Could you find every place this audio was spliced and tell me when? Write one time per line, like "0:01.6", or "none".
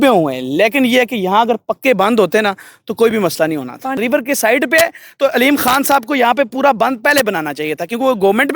0:04.0